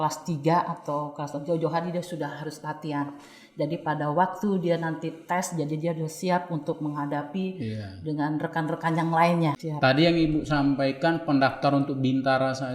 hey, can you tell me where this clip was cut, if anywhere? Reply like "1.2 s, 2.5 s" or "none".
9.7 s